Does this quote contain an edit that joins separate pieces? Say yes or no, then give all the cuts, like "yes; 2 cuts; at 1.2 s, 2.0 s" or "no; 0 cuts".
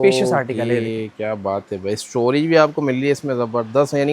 no; 0 cuts